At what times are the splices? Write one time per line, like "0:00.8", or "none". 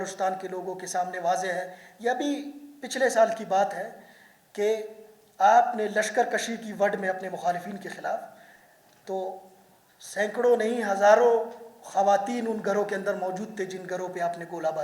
none